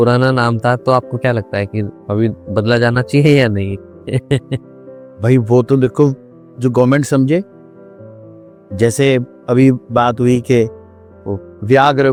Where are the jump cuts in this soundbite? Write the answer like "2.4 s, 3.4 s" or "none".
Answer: none